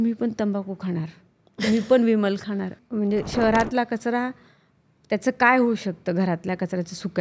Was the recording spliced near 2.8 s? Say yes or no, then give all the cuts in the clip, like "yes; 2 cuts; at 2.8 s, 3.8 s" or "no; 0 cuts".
yes; 1 cut; at 2.8 s